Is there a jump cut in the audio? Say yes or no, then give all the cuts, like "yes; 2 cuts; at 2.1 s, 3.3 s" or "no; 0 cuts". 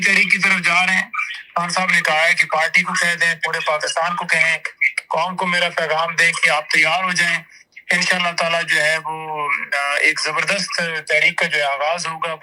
no; 0 cuts